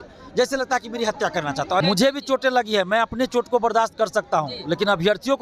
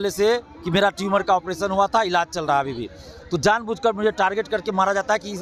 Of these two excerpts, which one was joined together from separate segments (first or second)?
first